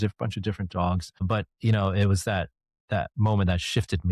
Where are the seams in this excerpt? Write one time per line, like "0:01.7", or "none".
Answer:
none